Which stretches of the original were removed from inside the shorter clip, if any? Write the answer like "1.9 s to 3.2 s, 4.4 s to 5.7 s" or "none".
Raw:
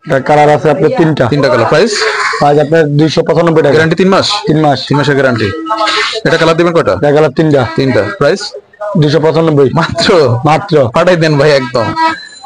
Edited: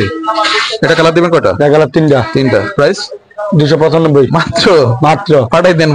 none